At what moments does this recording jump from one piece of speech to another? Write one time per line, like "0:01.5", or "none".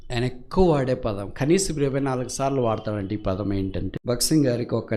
0:03.9